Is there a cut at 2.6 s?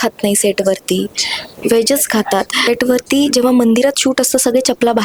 yes; 1 cut; at 2.6 s

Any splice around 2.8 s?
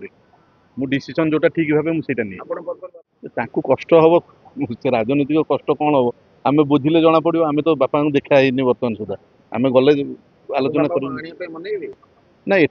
yes; 1 cut; at 2.8 s

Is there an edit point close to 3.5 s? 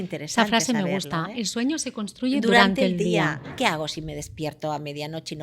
yes; 1 cut; at 3.5 s

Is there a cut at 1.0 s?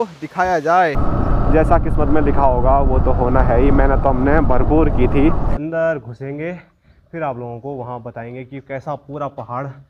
yes; 2 cuts; at 1.0 s, 5.5 s

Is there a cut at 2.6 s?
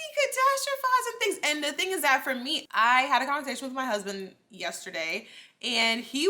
yes; 1 cut; at 2.6 s

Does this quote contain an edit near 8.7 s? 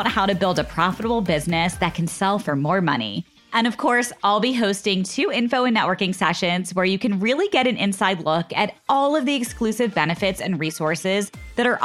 no; 0 cuts

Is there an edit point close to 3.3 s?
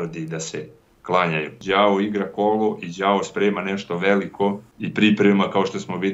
no; 2 cuts; at 1.5 s, 4.7 s

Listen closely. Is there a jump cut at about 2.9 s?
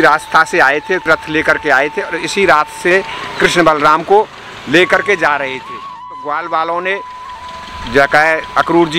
yes; 3 cuts; at 1.1 s, 2.9 s, 6.1 s

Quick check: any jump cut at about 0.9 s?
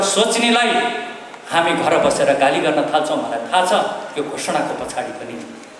no; 0 cuts

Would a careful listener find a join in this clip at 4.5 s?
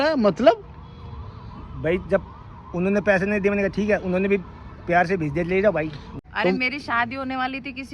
no; 1 cut; at 6.0 s

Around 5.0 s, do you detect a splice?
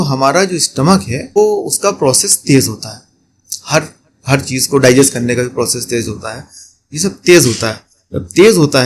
no; 1 cut; at 1.4 s

